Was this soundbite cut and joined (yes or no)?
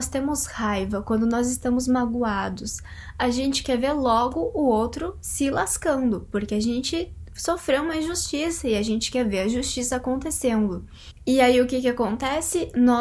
no